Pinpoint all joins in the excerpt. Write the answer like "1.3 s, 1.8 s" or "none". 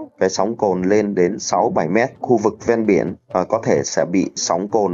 2.2 s